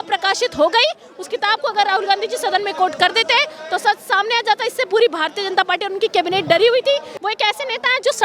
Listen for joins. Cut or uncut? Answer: cut